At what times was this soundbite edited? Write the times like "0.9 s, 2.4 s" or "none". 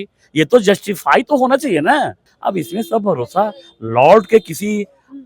2.2 s